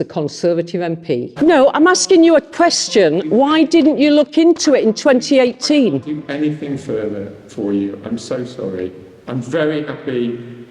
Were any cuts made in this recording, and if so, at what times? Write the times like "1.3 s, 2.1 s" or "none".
1.3 s